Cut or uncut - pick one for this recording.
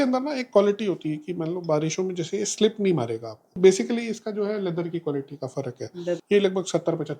cut